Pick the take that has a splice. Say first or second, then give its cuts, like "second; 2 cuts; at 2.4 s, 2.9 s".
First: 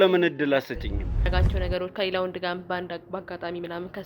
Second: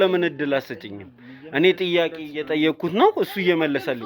first; 1 cut; at 1.3 s